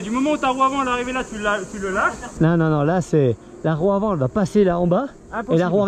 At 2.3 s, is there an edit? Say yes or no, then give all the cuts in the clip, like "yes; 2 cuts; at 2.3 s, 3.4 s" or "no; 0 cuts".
yes; 1 cut; at 2.3 s